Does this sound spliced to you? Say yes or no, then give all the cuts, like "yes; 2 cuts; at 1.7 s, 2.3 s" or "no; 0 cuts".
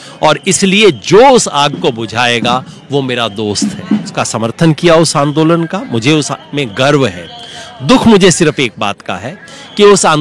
yes; 1 cut; at 4.1 s